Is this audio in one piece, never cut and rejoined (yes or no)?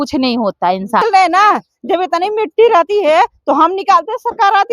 no